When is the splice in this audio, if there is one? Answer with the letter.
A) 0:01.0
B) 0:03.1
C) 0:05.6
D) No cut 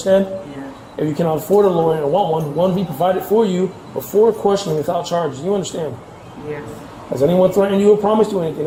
D